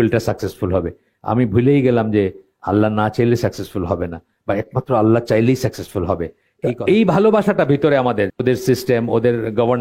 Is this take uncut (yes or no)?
no